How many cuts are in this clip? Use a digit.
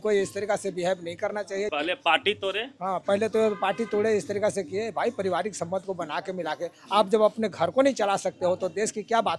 1